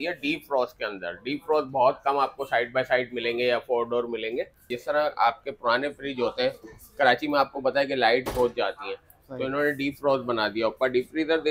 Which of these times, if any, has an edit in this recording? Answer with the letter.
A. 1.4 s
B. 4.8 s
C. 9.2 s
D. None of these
B